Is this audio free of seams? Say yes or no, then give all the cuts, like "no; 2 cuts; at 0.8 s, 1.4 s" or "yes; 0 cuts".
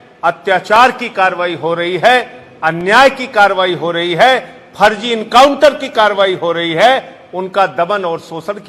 yes; 0 cuts